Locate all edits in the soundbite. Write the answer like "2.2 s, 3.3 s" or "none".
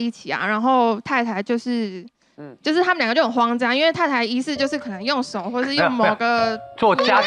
none